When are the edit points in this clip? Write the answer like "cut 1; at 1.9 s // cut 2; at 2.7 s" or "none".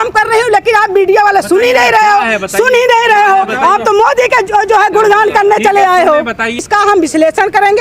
cut 1; at 6.7 s